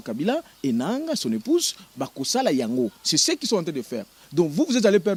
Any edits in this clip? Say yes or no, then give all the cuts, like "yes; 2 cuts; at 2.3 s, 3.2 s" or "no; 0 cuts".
no; 0 cuts